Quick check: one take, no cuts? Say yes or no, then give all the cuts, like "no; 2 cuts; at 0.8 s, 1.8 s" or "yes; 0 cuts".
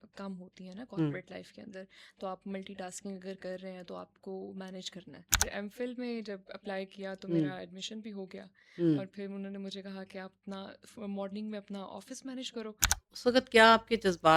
no; 2 cuts; at 5.4 s, 12.9 s